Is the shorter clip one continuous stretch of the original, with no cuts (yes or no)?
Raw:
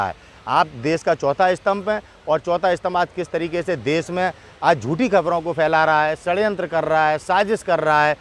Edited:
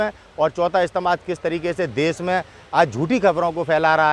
yes